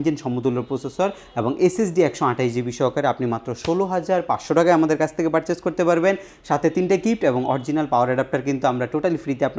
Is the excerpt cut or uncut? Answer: uncut